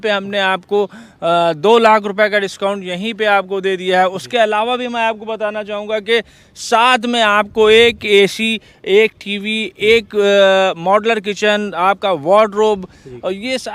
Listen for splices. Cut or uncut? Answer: uncut